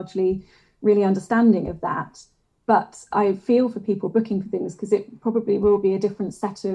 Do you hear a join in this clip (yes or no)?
no